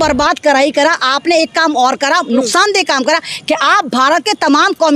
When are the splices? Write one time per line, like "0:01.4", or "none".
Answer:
none